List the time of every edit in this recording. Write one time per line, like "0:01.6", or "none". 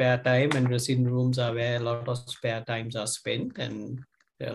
none